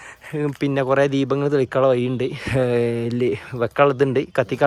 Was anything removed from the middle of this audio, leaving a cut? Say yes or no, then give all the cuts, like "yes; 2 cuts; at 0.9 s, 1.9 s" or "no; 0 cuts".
no; 0 cuts